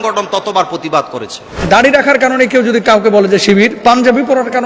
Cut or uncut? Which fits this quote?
cut